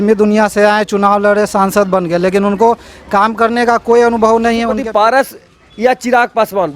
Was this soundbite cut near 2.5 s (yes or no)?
no